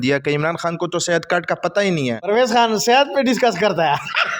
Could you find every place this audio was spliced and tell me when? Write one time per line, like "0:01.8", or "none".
0:02.2